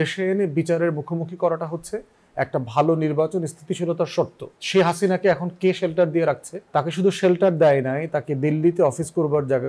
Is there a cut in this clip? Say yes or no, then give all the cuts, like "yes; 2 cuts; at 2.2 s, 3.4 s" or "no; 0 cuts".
no; 0 cuts